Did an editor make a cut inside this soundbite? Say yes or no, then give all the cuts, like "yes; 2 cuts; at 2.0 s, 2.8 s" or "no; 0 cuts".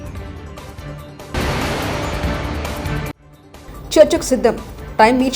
yes; 2 cuts; at 1.3 s, 3.2 s